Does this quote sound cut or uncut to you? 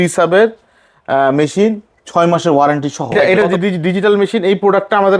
cut